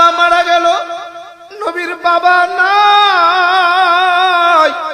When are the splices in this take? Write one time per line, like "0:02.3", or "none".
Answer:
0:01.4